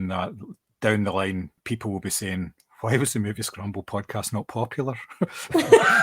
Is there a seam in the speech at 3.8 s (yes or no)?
no